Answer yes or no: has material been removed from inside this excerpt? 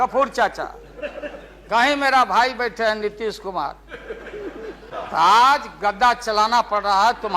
yes